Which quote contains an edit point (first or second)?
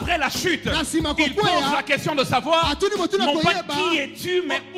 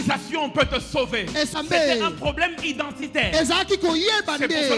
second